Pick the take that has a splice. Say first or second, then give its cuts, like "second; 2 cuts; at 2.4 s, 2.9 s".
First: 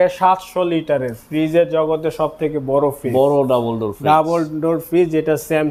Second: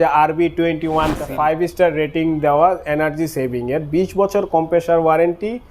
second; 1 cut; at 1.3 s